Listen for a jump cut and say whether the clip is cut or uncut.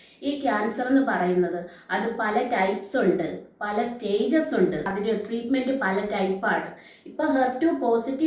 uncut